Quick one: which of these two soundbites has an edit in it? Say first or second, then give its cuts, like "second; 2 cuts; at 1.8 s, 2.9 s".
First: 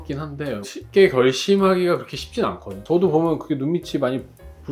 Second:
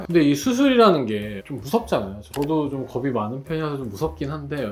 first; 1 cut; at 2.7 s